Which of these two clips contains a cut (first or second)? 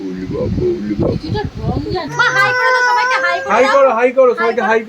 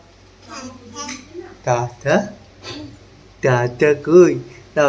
first